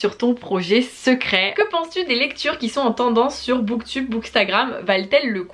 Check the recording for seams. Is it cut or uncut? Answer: cut